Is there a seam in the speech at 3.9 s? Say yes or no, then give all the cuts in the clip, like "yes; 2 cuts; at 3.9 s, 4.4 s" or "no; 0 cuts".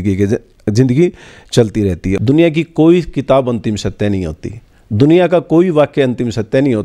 no; 1 cut; at 2.1 s